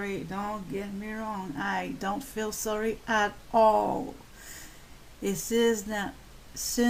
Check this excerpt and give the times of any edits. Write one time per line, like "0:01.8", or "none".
none